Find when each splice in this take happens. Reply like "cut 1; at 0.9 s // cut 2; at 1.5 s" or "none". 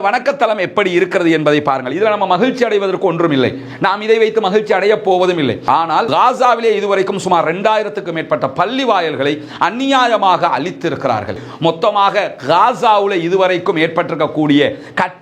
cut 1; at 5.8 s // cut 2; at 11.4 s

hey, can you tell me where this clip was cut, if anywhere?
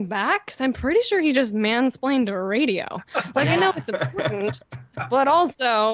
none

